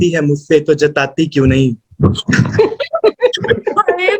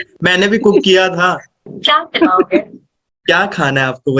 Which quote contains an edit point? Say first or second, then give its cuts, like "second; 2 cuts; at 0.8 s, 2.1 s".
second; 1 cut; at 1.7 s